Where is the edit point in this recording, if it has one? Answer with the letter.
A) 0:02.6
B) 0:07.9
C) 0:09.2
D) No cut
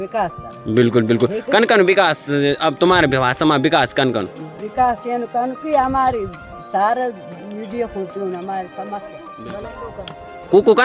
C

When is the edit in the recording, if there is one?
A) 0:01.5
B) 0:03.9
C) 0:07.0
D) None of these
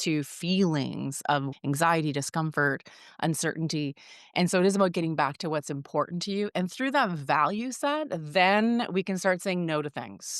A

